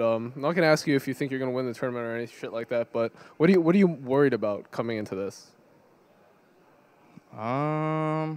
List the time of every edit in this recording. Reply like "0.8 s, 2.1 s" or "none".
4.2 s